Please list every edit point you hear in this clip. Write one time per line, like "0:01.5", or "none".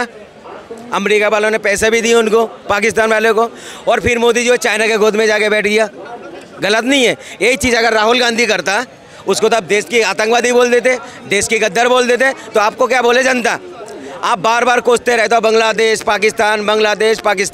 none